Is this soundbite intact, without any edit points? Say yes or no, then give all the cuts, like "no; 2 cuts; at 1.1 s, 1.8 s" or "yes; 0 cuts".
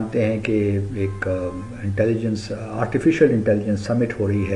yes; 0 cuts